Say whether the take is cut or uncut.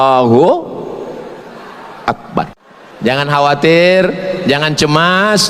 cut